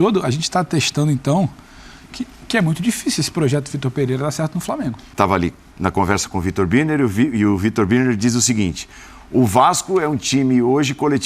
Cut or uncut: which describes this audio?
cut